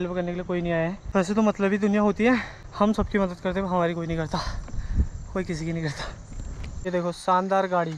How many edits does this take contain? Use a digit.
3